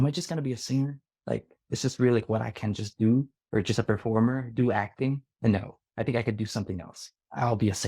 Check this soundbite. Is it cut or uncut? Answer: cut